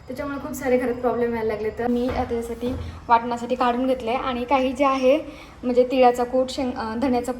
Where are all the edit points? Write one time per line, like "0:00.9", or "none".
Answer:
0:01.9